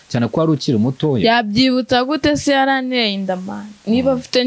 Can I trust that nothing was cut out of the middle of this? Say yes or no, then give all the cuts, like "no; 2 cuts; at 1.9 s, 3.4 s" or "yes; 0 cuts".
yes; 0 cuts